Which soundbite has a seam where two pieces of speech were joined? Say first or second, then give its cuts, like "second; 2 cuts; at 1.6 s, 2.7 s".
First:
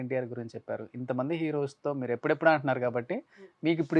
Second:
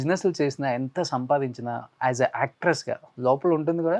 second; 1 cut; at 1.9 s